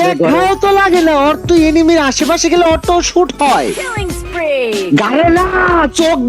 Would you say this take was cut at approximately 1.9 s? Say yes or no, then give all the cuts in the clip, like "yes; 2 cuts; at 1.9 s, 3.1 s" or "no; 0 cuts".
no; 0 cuts